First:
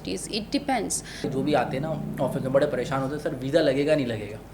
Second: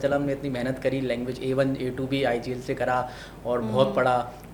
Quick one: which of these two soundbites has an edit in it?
first; 1 cut; at 1.3 s

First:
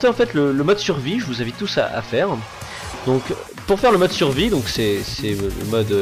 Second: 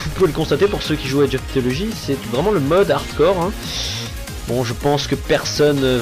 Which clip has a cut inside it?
second; 1 cut; at 2.3 s

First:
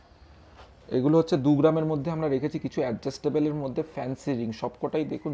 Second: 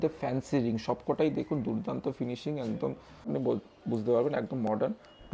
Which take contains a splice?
second; 1 cut; at 3.3 s

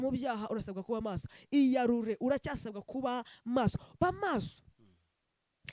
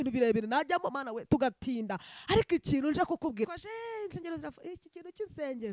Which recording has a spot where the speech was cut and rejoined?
second; 1 cut; at 3.5 s

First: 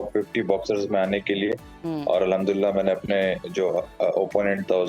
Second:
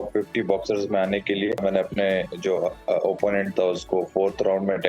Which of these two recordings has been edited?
second; 1 cut; at 1.6 s

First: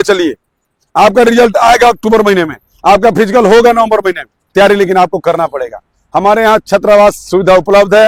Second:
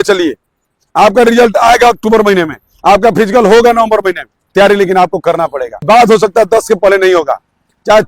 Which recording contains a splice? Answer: second; 1 cut; at 5.8 s

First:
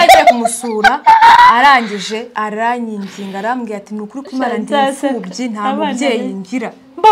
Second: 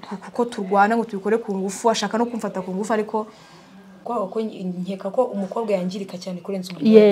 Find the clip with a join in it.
second; 1 cut; at 4.0 s

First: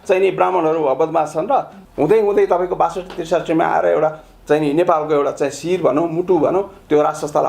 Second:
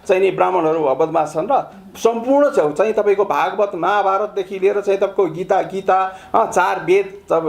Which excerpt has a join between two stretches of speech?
first; 1 cut; at 1.8 s

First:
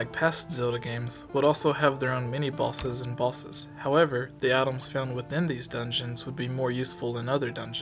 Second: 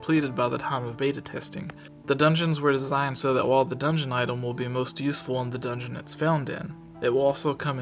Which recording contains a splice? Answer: first; 1 cut; at 2.5 s

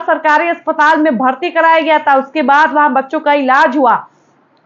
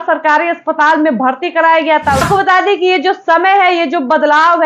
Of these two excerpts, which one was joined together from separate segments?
second; 1 cut; at 2.2 s

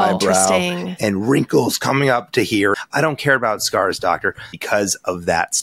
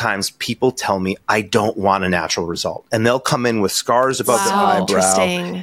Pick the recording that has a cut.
first; 2 cuts; at 2.8 s, 4.6 s

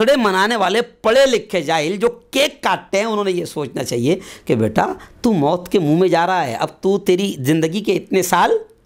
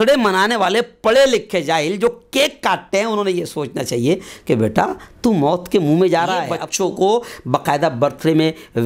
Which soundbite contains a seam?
second; 1 cut; at 6.6 s

